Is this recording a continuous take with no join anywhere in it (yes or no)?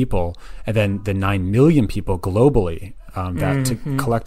yes